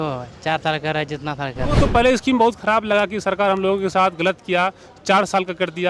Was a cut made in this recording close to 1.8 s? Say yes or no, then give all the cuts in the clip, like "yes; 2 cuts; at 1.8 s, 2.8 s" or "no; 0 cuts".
yes; 1 cut; at 1.8 s